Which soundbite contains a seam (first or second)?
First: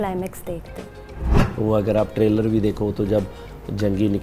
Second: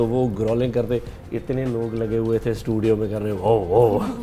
first